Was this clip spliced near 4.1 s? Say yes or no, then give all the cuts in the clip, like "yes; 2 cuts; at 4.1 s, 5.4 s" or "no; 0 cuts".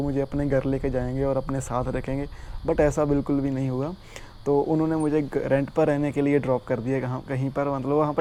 no; 0 cuts